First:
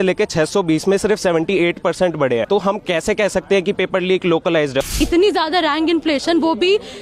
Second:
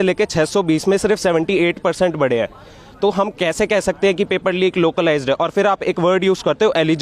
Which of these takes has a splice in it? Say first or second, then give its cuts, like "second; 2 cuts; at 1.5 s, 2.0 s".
first; 2 cuts; at 2.4 s, 4.9 s